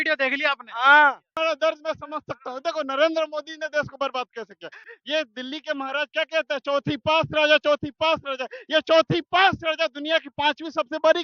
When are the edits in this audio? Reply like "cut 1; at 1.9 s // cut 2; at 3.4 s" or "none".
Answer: cut 1; at 1.3 s // cut 2; at 4.9 s